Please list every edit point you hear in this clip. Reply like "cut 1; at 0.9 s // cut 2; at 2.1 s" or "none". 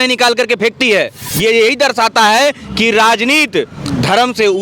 cut 1; at 1.2 s